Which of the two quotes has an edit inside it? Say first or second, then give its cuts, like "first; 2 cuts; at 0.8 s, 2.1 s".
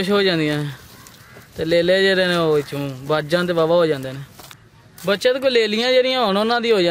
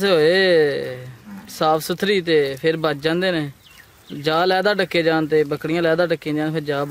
first; 1 cut; at 4.6 s